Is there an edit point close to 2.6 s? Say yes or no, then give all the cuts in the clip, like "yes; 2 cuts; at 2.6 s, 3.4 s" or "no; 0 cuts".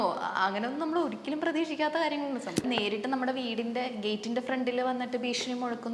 yes; 1 cut; at 2.6 s